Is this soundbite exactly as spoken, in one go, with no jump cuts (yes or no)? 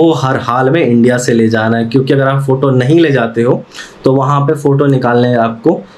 yes